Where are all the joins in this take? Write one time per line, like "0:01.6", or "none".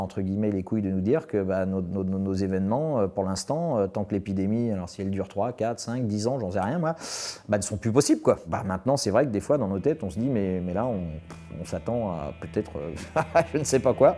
0:08.5